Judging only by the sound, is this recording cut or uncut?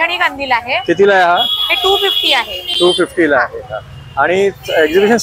uncut